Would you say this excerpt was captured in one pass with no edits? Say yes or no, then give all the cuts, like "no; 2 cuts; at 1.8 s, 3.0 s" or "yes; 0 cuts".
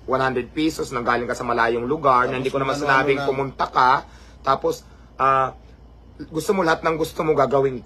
yes; 0 cuts